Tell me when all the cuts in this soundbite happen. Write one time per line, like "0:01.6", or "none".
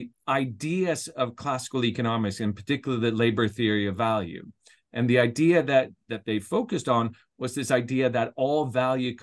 0:06.0